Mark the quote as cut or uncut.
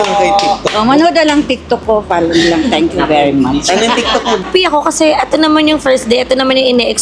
cut